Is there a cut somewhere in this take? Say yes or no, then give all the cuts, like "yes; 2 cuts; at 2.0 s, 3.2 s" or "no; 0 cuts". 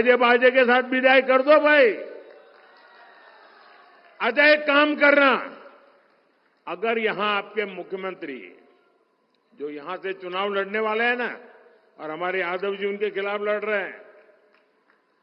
no; 0 cuts